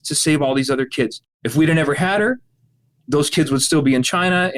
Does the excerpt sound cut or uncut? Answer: cut